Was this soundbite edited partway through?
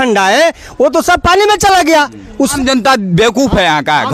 yes; 1 cut; at 2.5 s

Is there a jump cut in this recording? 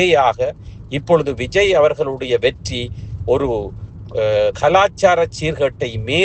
no; 0 cuts

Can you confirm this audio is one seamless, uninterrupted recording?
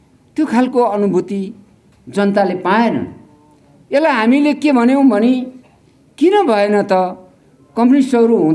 yes; 0 cuts

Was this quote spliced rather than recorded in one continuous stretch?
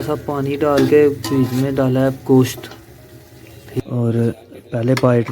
yes; 1 cut; at 3.8 s

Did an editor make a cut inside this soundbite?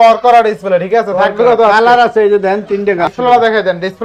yes; 1 cut; at 3.1 s

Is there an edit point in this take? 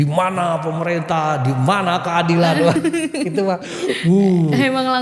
no; 0 cuts

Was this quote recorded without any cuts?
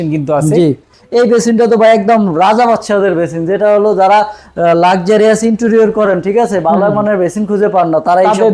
no; 1 cut; at 0.9 s

